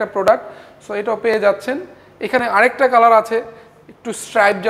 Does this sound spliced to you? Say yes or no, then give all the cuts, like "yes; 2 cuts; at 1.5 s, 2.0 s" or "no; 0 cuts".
no; 0 cuts